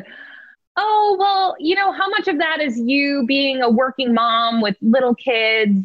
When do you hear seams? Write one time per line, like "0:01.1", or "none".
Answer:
none